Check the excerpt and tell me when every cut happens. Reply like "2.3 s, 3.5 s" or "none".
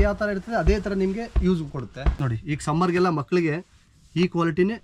2.1 s